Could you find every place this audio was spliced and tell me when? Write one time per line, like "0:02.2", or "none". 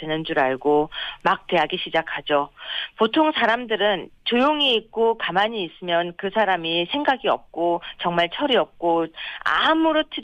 0:04.8